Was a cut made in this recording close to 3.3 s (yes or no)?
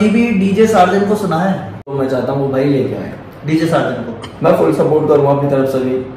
no